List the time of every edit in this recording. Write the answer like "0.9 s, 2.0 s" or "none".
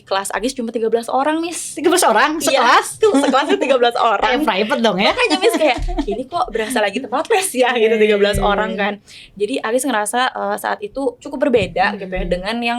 none